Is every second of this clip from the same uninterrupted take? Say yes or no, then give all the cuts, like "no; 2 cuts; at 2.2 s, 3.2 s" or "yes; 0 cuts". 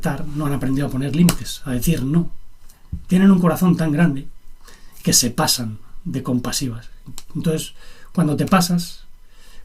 yes; 0 cuts